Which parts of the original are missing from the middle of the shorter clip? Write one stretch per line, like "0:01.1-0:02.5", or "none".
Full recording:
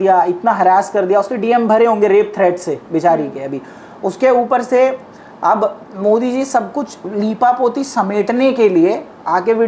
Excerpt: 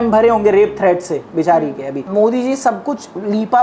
0:03.5-0:05.9